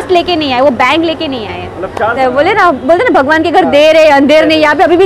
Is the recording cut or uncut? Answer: cut